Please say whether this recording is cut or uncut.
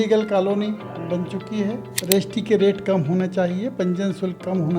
cut